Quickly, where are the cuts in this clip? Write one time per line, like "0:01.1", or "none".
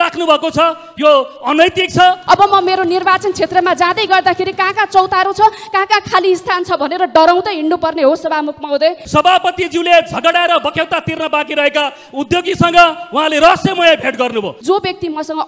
0:02.2
0:09.0
0:14.5